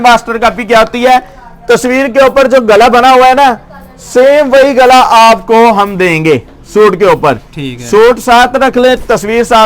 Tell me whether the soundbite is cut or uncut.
uncut